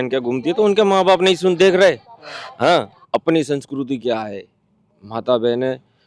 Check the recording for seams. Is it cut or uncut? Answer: uncut